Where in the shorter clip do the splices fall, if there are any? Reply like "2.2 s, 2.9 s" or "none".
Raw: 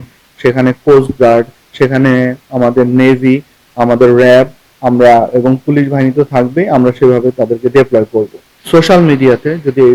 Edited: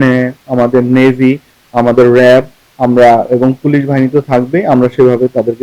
none